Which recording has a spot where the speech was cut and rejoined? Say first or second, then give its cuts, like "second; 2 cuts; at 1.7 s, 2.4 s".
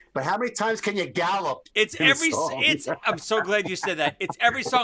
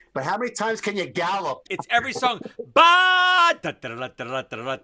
second; 1 cut; at 1.7 s